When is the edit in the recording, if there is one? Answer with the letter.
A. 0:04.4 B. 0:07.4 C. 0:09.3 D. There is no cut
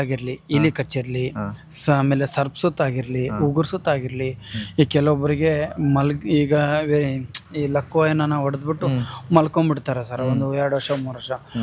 D